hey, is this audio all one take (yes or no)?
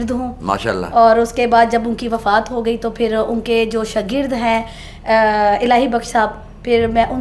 yes